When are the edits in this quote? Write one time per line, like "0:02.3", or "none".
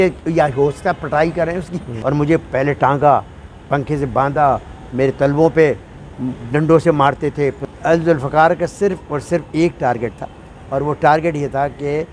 0:01.9
0:07.6